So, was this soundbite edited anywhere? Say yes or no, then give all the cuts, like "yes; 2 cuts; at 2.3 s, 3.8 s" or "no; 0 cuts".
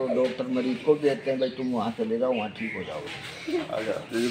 no; 0 cuts